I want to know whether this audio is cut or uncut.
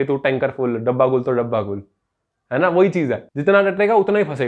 uncut